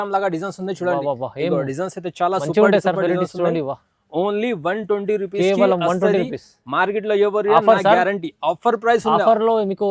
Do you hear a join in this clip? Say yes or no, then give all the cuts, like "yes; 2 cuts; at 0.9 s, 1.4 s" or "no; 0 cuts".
no; 0 cuts